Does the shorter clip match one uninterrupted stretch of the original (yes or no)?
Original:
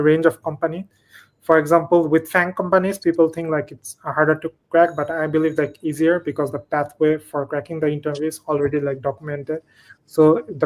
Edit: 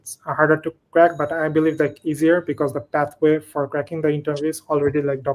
yes